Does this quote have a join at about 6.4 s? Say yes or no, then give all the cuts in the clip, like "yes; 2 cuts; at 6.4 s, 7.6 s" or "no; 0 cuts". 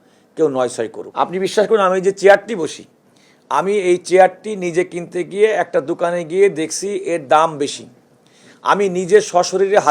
no; 1 cut; at 1.0 s